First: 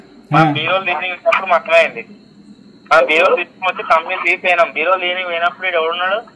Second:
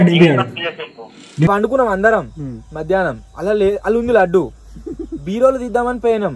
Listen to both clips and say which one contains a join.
second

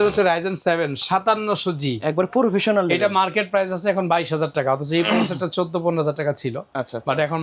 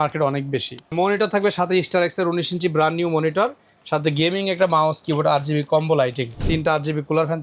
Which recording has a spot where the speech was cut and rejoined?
second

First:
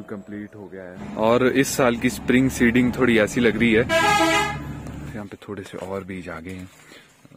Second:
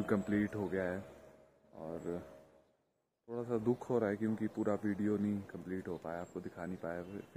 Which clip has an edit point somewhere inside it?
first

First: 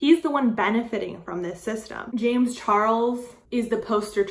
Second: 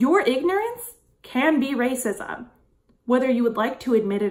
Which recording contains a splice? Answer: first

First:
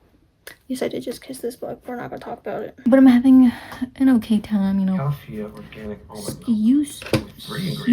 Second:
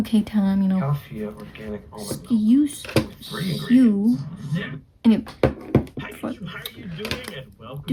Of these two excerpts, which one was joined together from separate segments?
first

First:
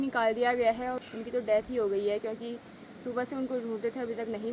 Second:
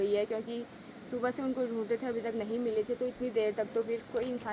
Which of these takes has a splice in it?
first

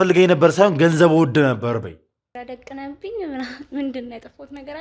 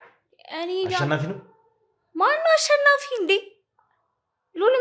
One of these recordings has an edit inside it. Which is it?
first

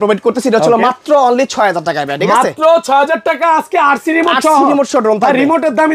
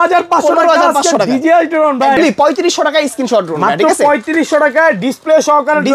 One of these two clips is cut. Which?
second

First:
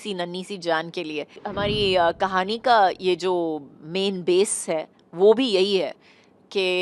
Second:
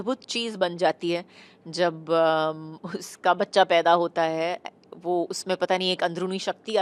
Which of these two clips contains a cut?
first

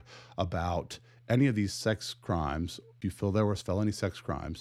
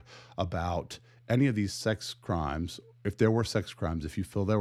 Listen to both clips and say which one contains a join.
first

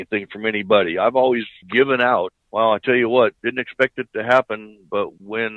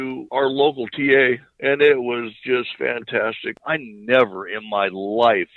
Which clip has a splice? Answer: second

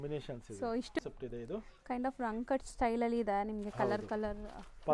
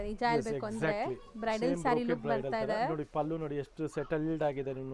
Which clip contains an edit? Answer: first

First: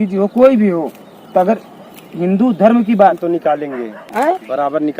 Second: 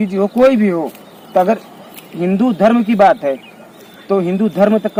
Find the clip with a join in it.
first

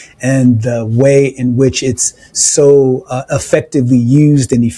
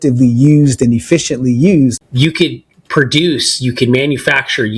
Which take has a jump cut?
second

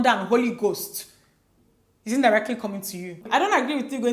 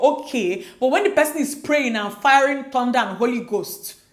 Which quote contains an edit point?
first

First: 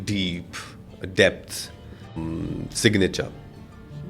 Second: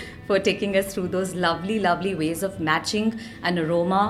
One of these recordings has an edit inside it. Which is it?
first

